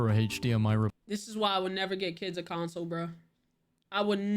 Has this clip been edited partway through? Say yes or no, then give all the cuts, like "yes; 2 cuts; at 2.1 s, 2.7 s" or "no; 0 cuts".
yes; 1 cut; at 1.0 s